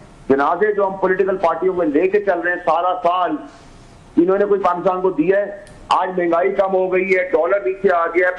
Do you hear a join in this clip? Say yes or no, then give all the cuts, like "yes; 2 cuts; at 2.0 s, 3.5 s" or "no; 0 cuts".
no; 0 cuts